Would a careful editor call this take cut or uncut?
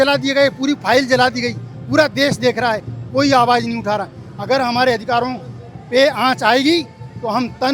uncut